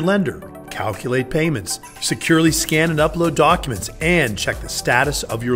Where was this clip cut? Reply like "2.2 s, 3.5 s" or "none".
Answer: none